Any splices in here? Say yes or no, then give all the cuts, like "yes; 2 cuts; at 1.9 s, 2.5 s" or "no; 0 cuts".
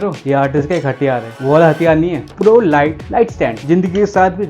yes; 1 cut; at 2.3 s